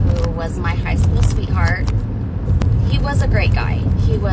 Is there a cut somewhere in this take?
yes; 1 cut; at 2.6 s

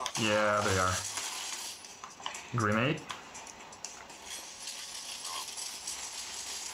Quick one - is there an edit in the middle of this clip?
yes; 1 cut; at 5.5 s

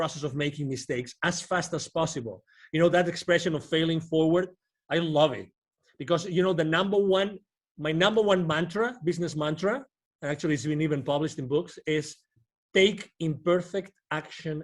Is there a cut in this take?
no; 0 cuts

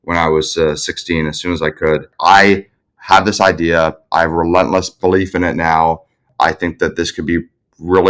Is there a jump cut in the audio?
yes; 2 cuts; at 2.1 s, 6.3 s

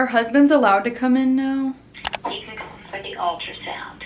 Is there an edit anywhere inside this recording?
no; 0 cuts

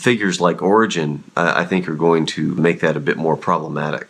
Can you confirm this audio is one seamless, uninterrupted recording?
no; 1 cut; at 2.6 s

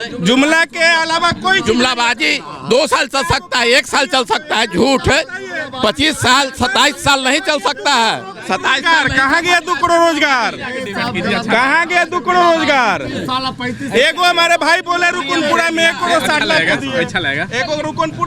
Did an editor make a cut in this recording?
no; 0 cuts

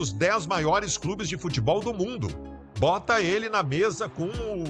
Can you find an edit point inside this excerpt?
no; 0 cuts

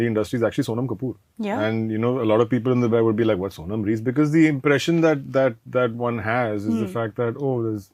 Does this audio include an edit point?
no; 0 cuts

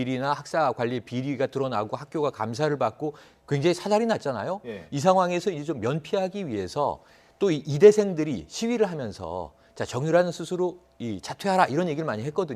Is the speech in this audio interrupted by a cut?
yes; 1 cut; at 7.7 s

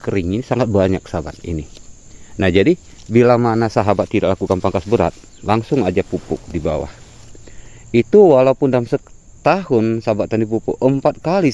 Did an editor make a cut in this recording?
no; 0 cuts

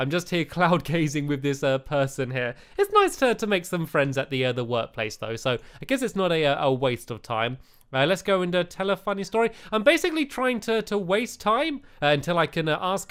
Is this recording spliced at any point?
no; 0 cuts

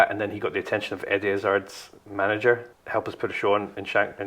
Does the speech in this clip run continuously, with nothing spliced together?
no; 1 cut; at 2.7 s

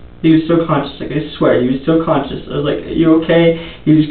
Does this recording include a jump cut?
no; 0 cuts

